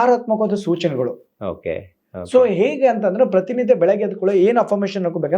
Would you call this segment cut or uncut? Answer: uncut